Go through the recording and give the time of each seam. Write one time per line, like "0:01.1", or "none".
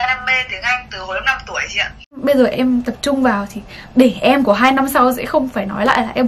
0:02.1